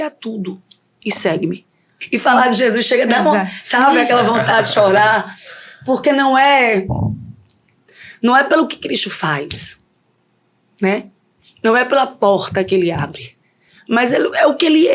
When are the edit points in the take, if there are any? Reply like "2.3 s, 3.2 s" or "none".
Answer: 2.0 s